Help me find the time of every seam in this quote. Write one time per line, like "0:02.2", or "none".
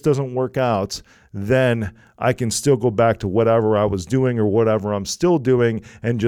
none